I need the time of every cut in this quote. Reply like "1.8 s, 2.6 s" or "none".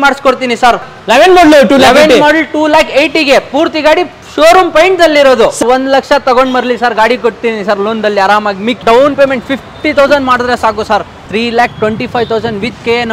0.9 s, 5.6 s, 8.8 s, 11.3 s